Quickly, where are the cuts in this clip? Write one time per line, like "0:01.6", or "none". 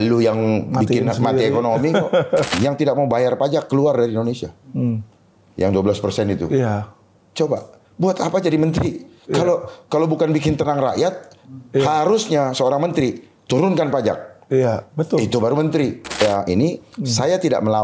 0:02.5
0:16.2